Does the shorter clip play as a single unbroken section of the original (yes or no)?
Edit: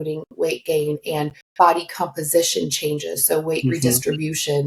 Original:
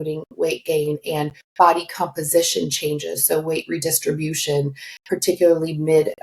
yes